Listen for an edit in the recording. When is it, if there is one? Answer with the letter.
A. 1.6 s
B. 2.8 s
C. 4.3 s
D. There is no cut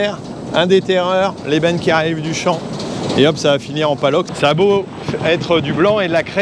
C